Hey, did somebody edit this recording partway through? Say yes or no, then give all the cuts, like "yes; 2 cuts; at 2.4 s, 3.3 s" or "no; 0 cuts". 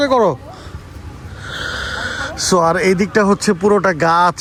no; 0 cuts